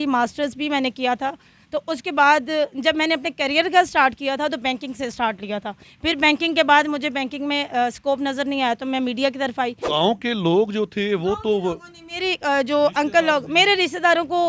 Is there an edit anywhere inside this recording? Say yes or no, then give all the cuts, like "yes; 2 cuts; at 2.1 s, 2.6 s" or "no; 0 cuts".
yes; 1 cut; at 9.8 s